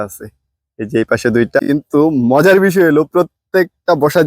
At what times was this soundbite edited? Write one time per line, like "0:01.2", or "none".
0:01.6